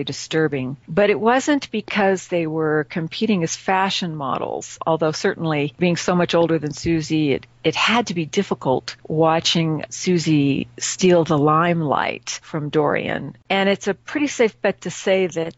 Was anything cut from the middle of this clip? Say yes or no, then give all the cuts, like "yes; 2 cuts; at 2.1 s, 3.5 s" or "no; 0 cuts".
yes; 1 cut; at 13.4 s